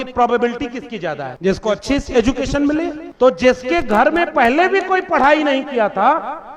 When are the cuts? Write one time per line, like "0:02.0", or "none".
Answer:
0:01.3
0:03.0